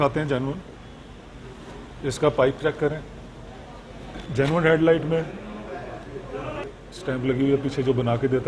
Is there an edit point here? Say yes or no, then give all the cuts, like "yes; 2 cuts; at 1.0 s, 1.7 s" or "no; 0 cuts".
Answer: yes; 2 cuts; at 4.2 s, 6.6 s